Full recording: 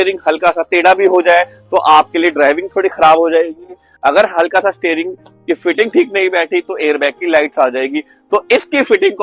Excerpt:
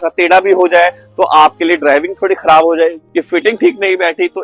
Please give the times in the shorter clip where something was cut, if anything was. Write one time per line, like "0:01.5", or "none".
0:03.0

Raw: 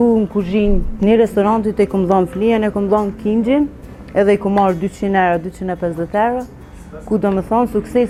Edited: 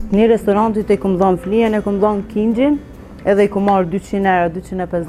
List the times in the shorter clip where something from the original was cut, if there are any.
none

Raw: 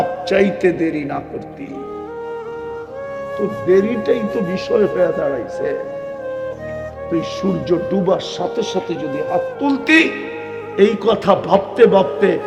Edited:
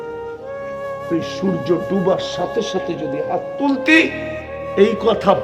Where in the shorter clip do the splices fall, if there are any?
0:00.9

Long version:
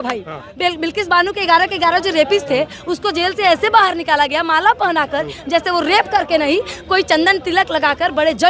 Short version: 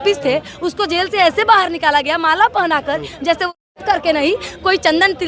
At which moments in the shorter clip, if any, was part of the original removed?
none

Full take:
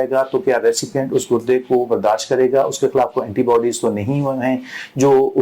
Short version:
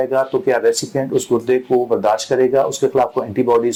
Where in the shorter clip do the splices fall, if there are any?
none

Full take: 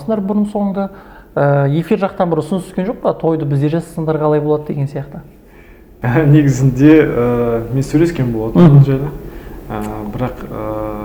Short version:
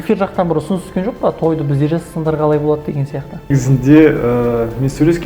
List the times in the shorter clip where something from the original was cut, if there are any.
0:03.5

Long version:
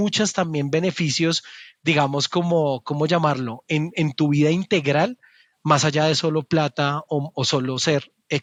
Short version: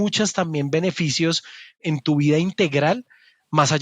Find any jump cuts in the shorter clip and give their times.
0:01.8

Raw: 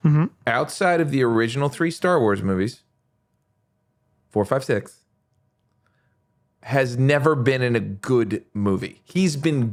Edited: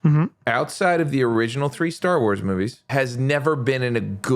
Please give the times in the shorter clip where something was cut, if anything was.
0:02.8

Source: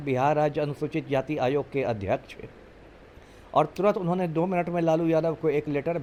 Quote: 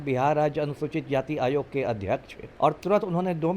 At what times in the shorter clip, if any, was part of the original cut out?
0:02.4

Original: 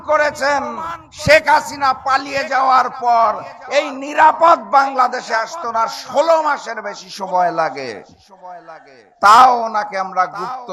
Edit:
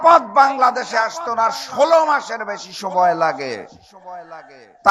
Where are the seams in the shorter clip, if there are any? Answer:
none

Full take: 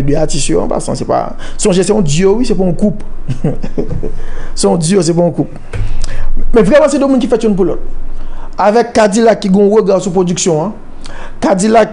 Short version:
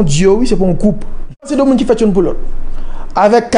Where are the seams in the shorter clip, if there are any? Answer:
0:01.5

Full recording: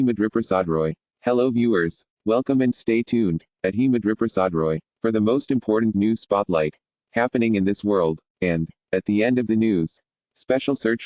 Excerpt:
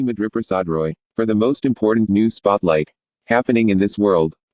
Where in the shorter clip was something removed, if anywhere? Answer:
0:01.0

